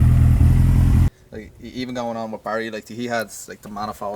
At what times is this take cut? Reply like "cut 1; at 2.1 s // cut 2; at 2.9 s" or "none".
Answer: cut 1; at 1.1 s